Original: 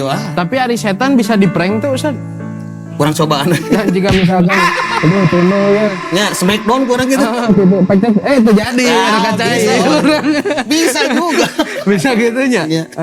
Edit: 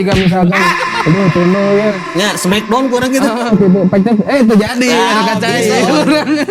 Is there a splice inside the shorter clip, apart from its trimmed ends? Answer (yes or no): no